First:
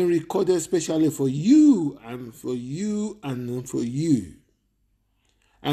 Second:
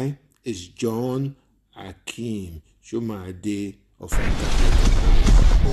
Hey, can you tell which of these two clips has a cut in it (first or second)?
second